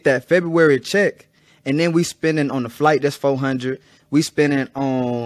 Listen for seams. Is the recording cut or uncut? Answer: uncut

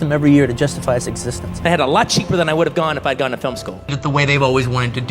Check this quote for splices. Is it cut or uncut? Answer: cut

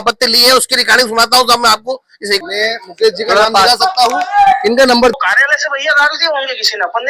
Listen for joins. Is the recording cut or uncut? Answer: cut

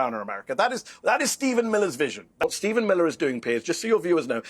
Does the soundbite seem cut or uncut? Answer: cut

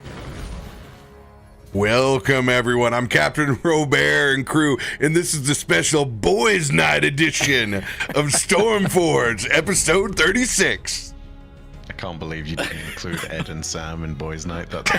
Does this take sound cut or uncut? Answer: cut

